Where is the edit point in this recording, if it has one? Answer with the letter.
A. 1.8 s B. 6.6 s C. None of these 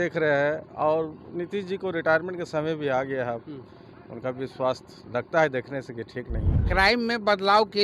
B